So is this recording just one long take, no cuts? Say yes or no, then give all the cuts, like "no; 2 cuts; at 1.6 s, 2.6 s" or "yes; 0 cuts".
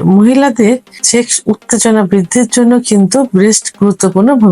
no; 1 cut; at 1.0 s